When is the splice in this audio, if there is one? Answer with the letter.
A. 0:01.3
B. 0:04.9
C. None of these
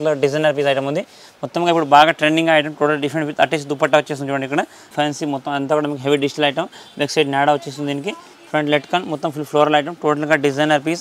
B